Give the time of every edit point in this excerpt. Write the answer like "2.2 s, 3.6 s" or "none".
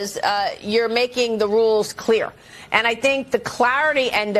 2.9 s